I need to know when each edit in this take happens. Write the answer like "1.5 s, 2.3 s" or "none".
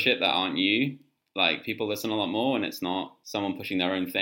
3.2 s